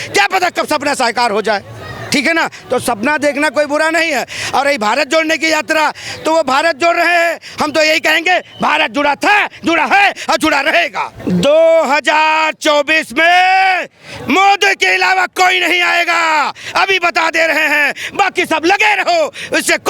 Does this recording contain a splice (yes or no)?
yes